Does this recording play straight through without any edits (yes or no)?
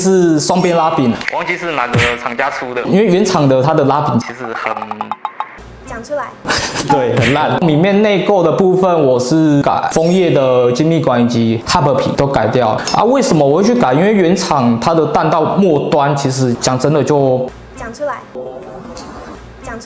no